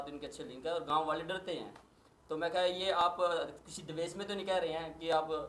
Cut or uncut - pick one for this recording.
uncut